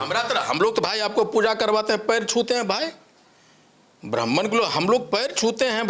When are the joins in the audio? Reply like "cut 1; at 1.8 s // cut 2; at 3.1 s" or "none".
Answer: none